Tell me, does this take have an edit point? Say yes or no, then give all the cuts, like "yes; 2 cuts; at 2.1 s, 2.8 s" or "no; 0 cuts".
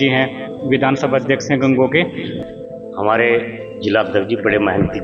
yes; 1 cut; at 2.3 s